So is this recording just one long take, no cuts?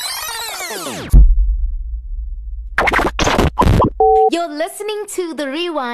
yes; 0 cuts

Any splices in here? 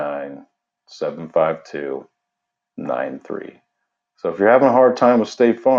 no; 0 cuts

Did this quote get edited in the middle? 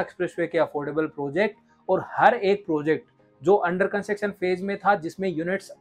no; 0 cuts

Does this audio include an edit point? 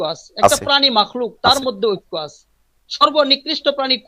no; 0 cuts

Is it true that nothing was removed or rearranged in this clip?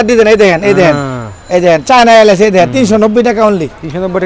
yes; 0 cuts

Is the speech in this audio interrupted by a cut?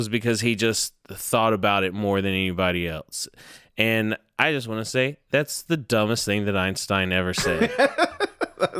no; 0 cuts

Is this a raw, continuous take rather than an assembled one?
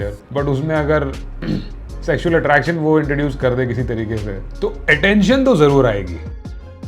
yes; 0 cuts

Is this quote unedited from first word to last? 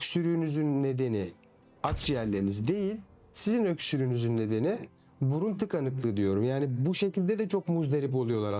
yes; 0 cuts

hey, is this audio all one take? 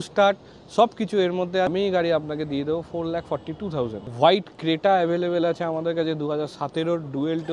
no; 2 cuts; at 1.7 s, 4.1 s

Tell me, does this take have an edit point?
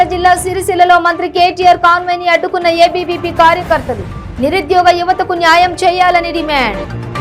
no; 0 cuts

